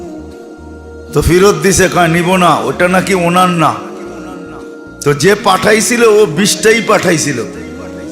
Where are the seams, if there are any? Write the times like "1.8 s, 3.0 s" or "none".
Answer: 1.1 s